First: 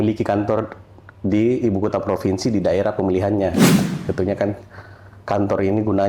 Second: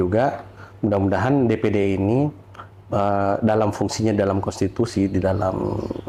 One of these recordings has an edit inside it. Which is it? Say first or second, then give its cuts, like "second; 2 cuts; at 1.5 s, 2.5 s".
first; 1 cut; at 3.9 s